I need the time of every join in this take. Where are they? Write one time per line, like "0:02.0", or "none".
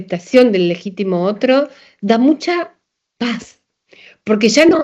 none